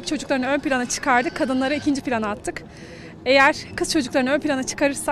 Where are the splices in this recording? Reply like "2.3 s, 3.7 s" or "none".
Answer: none